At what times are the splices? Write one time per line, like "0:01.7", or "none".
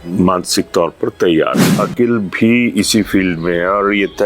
0:01.8